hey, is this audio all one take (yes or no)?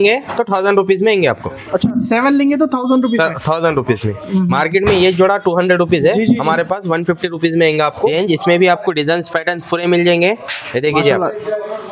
no